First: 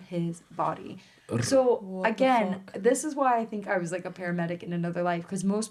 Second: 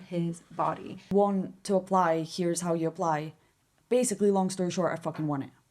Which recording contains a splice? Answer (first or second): second